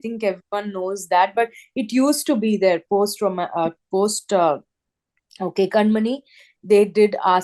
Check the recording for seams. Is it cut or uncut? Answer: uncut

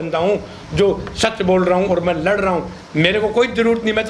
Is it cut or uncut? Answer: uncut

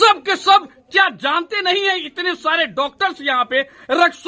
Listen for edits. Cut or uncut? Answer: uncut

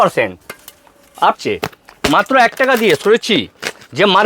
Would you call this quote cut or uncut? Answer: cut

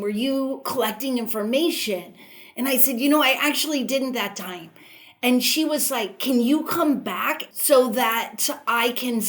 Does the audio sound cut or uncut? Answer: cut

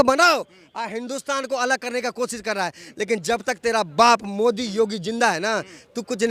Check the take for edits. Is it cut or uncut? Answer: uncut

